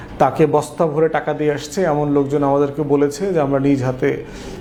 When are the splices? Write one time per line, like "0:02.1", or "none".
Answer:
none